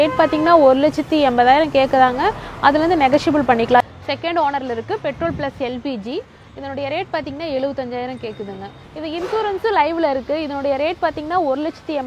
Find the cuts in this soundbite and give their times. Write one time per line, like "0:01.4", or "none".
0:03.8
0:08.8